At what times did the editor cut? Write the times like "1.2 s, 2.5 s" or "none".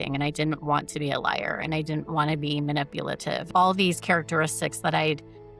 3.4 s